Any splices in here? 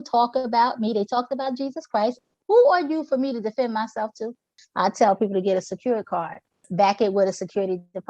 yes; 3 cuts; at 2.3 s, 4.6 s, 6.6 s

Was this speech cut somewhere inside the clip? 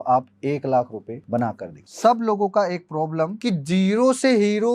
yes; 2 cuts; at 1.6 s, 3.4 s

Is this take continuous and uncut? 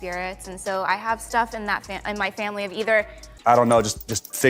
no; 1 cut; at 3.2 s

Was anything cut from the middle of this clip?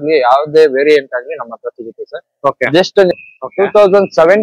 yes; 1 cut; at 3.1 s

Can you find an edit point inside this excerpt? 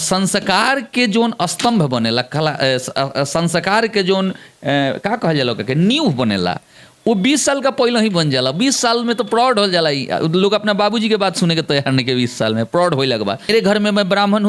yes; 1 cut; at 13.5 s

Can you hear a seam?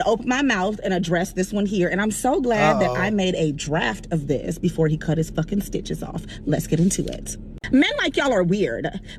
no; 0 cuts

